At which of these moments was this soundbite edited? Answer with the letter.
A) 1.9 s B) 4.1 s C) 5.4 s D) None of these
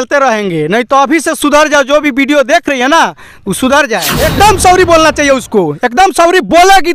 B